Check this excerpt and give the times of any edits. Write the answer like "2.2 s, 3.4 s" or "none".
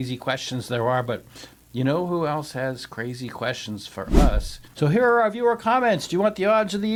none